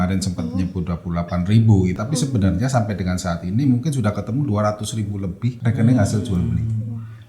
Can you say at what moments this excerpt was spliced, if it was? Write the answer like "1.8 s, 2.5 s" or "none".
1.9 s, 5.6 s